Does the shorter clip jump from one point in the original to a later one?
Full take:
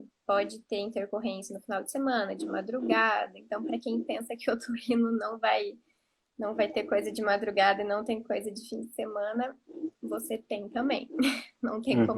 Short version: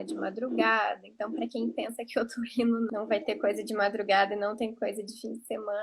yes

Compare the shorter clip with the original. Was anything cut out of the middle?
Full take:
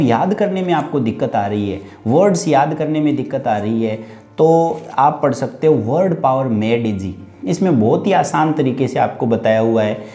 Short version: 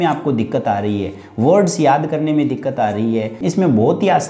yes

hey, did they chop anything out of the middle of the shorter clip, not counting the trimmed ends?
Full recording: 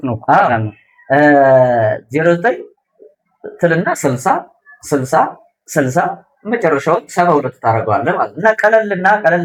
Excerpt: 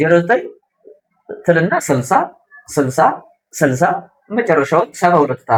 no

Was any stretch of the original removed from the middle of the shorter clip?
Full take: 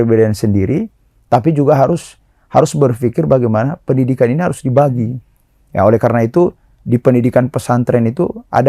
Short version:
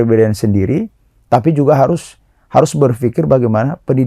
no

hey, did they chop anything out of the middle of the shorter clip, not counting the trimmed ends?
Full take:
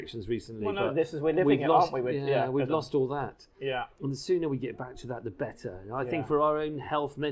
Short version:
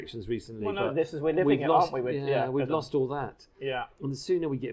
no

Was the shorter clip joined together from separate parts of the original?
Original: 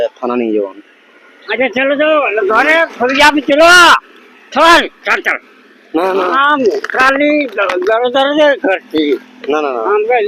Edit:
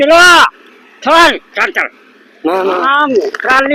no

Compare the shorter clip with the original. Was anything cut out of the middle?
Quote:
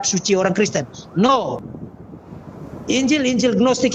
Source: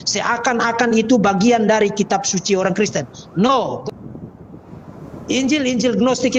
yes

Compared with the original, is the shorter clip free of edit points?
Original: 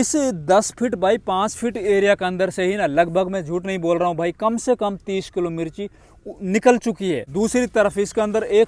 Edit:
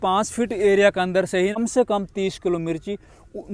no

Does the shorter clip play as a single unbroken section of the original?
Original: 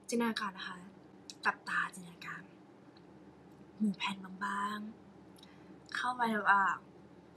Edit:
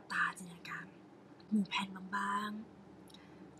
no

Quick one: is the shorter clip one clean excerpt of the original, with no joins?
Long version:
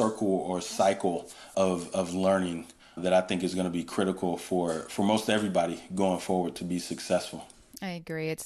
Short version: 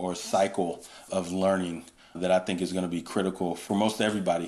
no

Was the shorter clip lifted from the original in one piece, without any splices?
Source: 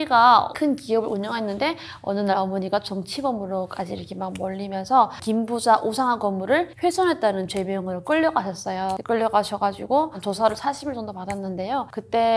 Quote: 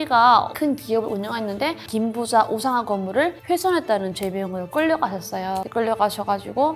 no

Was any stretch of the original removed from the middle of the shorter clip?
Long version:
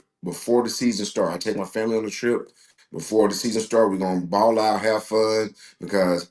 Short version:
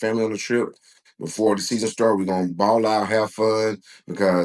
no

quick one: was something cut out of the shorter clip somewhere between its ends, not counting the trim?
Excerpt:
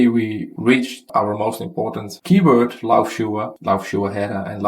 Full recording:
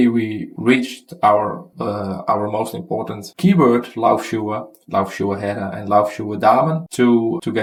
yes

